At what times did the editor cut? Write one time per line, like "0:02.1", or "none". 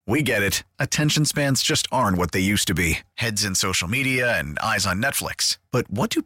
none